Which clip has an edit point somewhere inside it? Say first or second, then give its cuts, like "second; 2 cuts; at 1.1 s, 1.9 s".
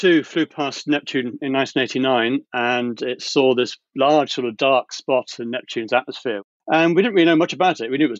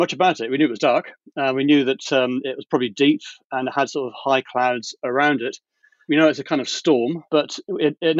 first; 1 cut; at 6.5 s